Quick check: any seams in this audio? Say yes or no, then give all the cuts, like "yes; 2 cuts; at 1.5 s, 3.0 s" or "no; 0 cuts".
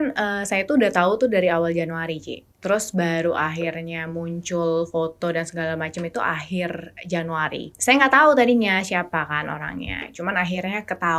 yes; 1 cut; at 7.7 s